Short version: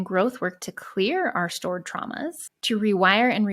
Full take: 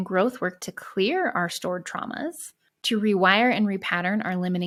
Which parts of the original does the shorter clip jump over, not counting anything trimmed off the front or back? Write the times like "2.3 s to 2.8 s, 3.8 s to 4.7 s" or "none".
2.5 s to 2.7 s